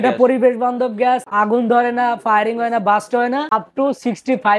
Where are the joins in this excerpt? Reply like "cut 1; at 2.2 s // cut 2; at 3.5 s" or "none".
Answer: cut 1; at 1.3 s // cut 2; at 3.5 s